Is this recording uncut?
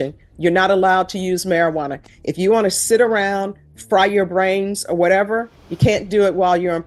yes; 0 cuts

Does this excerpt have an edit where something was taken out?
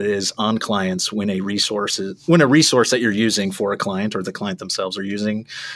no; 0 cuts

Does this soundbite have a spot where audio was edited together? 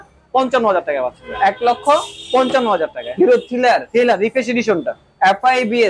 no; 0 cuts

